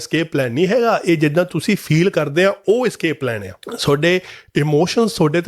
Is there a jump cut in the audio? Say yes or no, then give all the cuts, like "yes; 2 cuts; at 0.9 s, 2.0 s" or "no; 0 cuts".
no; 0 cuts